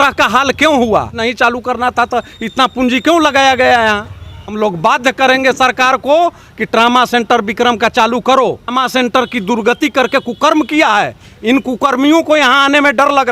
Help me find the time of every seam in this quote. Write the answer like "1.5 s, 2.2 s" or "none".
1.2 s, 4.1 s, 8.7 s